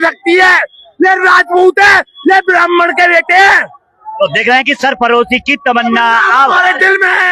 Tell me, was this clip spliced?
no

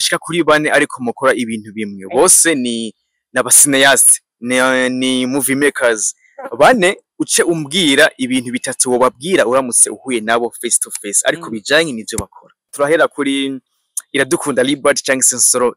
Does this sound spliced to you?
yes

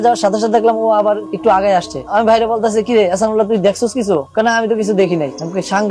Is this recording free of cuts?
yes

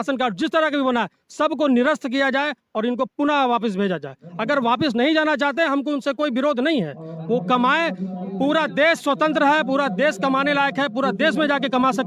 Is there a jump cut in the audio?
no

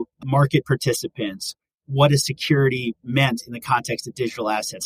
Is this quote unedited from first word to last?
yes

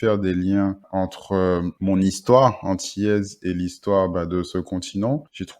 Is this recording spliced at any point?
no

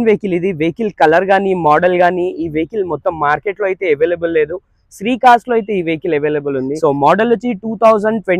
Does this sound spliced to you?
no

